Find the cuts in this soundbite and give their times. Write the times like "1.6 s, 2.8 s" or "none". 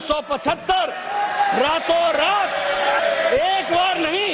3.0 s